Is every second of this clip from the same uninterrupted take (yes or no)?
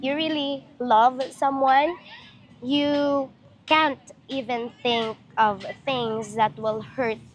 yes